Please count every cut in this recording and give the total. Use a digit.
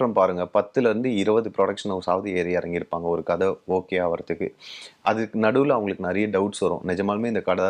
0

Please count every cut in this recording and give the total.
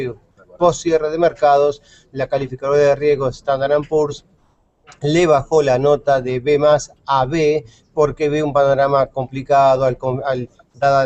0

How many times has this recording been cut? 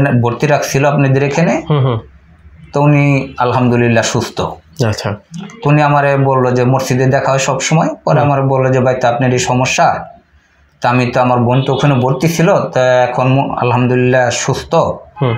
0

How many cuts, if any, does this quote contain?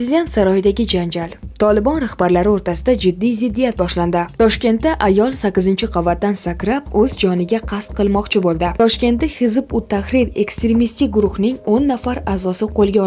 2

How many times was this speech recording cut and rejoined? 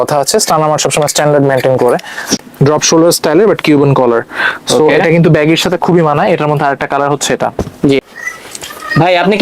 2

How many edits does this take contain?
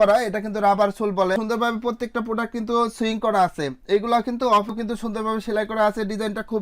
1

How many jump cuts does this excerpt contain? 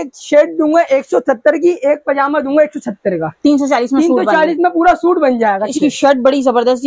1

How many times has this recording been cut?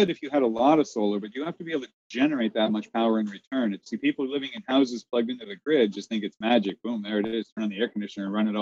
1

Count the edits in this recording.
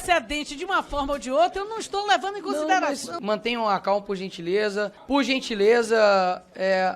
2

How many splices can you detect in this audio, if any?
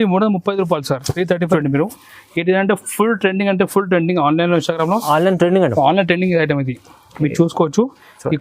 1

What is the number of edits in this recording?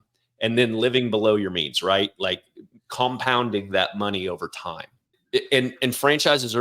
1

